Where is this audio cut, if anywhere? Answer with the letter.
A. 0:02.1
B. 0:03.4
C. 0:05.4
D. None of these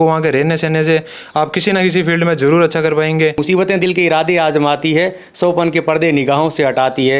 B